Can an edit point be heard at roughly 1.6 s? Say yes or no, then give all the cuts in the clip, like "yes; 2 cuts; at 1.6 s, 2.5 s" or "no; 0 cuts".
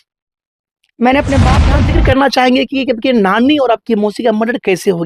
yes; 1 cut; at 1.6 s